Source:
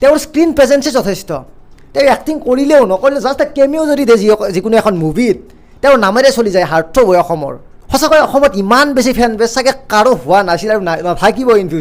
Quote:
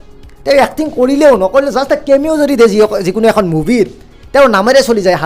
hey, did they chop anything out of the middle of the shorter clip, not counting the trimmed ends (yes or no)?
no